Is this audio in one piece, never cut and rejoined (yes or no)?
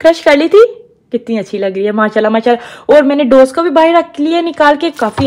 yes